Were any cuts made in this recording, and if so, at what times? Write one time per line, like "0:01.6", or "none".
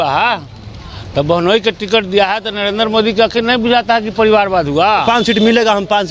0:05.0